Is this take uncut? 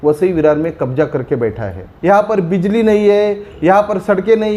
no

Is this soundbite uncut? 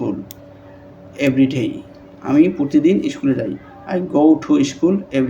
yes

